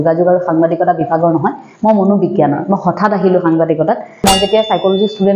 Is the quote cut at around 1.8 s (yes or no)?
no